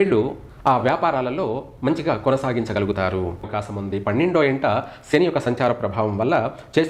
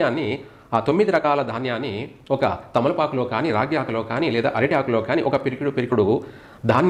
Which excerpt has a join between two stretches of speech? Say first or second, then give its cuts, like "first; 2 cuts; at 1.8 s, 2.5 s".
first; 1 cut; at 3.6 s